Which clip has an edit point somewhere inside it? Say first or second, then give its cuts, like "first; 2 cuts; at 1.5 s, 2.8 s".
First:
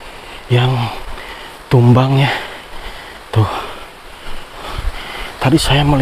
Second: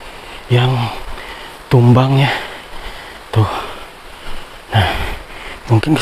first; 1 cut; at 4.6 s